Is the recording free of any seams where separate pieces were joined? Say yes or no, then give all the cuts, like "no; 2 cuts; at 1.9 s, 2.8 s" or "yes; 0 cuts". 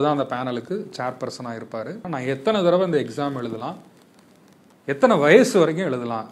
no; 1 cut; at 2.0 s